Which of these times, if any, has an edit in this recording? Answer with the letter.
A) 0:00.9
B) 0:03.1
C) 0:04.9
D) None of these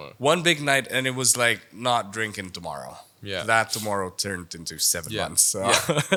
D